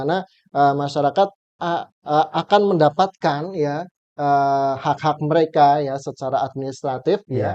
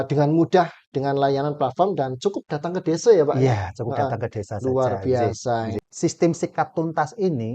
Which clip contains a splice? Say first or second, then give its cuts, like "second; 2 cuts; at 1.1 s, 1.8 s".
second; 1 cut; at 5.8 s